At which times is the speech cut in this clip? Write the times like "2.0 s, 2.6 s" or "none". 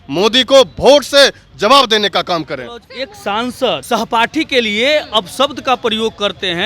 2.9 s, 3.8 s